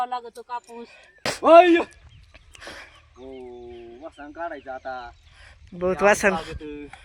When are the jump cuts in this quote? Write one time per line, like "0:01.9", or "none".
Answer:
0:01.1